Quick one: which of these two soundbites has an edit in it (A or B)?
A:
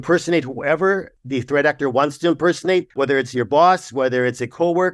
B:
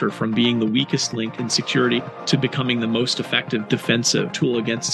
A